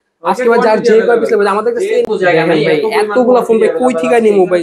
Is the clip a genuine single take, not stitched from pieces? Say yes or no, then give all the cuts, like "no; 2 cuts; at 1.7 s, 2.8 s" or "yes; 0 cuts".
no; 1 cut; at 2.1 s